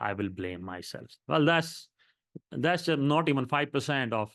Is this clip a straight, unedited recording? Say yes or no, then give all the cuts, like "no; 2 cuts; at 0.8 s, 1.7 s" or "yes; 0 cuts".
yes; 0 cuts